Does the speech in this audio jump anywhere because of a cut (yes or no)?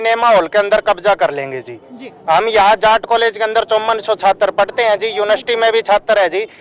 no